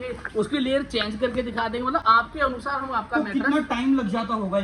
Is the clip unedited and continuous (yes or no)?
yes